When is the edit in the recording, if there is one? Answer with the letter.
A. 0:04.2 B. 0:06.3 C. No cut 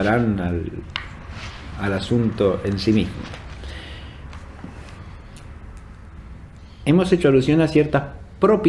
B